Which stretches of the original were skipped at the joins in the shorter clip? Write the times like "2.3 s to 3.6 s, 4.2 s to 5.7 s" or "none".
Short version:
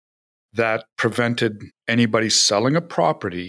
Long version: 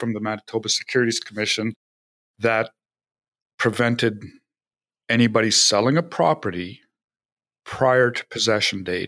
2.8 s to 3.5 s, 4.3 s to 4.9 s